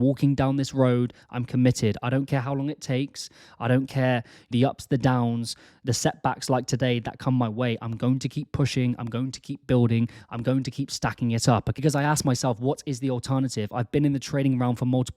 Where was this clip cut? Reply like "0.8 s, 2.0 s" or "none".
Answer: 4.5 s